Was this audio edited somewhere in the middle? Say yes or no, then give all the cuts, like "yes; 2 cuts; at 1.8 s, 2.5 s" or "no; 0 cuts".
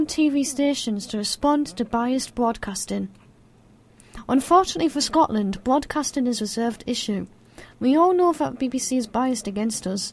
no; 0 cuts